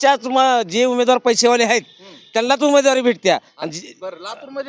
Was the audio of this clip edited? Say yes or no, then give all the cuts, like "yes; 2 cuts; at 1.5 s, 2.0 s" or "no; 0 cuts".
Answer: no; 0 cuts